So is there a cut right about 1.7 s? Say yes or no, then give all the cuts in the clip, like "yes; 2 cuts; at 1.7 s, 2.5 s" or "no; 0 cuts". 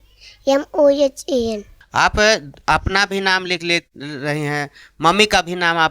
yes; 1 cut; at 1.7 s